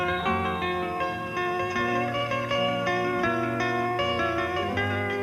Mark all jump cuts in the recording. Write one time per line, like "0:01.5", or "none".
0:03.1